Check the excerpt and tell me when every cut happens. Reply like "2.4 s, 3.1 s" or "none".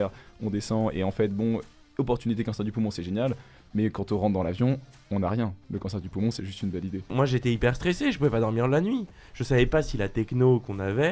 7.1 s